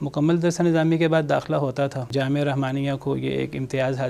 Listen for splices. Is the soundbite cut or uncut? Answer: cut